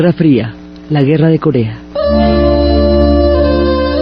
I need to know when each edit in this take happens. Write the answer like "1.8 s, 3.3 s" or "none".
none